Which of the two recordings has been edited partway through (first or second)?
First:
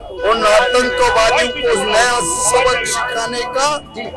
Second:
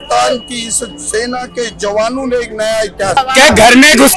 second